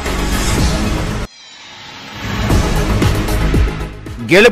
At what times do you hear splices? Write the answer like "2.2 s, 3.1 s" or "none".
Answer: 1.2 s